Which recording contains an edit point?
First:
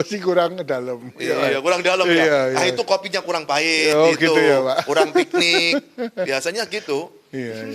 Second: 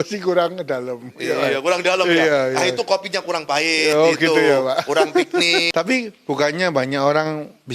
second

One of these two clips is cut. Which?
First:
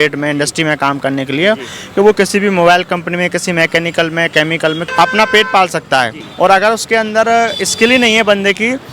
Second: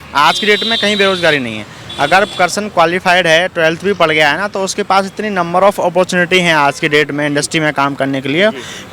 first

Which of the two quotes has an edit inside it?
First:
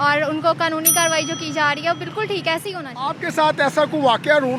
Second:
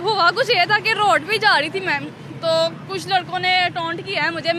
first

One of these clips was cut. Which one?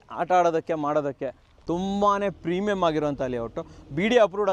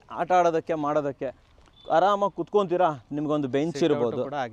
first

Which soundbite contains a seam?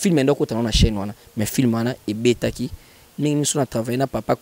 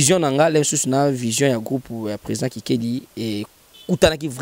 first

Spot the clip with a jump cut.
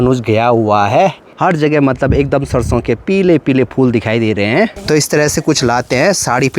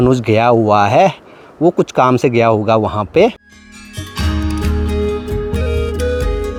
first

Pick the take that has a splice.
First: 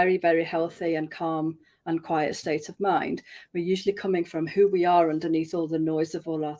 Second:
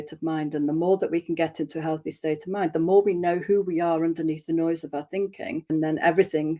second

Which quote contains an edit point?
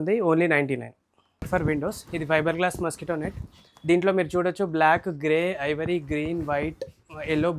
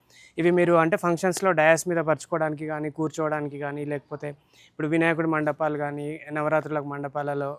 first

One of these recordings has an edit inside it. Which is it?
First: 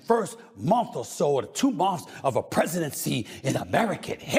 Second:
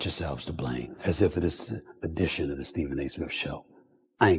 second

